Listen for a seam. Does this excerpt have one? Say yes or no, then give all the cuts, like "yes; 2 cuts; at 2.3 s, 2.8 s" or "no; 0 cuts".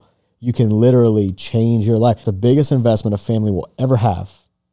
yes; 1 cut; at 2.3 s